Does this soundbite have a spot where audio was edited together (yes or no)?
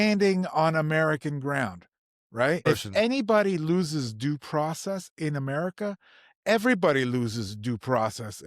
yes